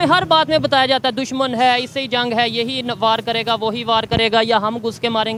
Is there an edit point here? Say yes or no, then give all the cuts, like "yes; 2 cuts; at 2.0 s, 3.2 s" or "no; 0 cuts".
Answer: no; 0 cuts